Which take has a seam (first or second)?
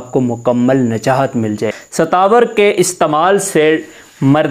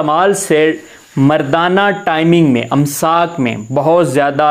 first